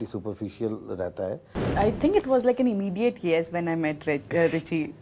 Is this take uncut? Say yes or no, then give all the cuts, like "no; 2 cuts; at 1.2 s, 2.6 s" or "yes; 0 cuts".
no; 1 cut; at 1.6 s